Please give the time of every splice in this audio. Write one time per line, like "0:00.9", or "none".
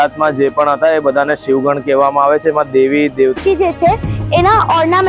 0:03.4

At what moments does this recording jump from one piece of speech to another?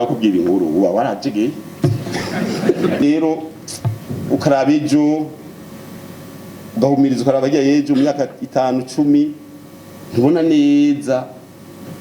0:03.0

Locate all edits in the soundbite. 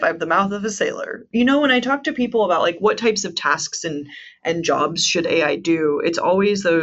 0:01.3

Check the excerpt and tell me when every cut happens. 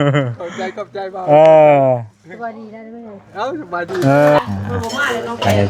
0:04.4

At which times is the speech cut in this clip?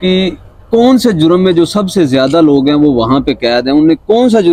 none

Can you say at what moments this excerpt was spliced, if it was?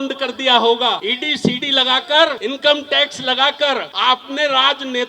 0:01.1
0:02.4
0:03.9

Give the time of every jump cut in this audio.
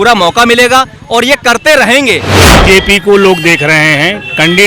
0:02.5

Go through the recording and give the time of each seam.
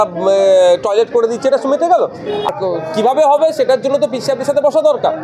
0:02.5

